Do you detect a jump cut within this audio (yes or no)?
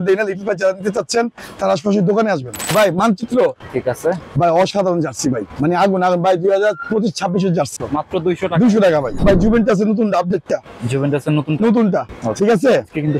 yes